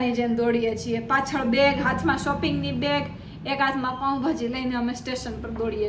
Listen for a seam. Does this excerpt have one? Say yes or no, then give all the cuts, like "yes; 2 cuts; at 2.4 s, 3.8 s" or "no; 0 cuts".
no; 0 cuts